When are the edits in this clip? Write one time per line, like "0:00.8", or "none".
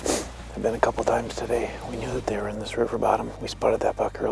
none